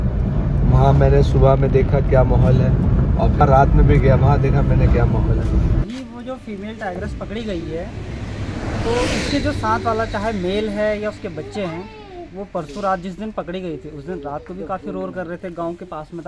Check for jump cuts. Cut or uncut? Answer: cut